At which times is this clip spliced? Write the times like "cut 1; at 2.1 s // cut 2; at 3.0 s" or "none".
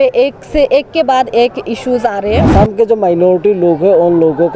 cut 1; at 2.5 s